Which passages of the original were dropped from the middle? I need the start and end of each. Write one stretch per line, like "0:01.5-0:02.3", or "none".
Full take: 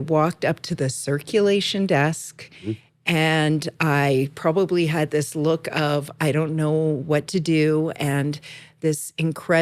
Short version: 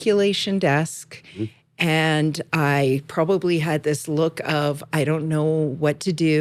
none